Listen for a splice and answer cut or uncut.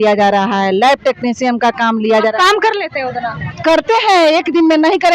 uncut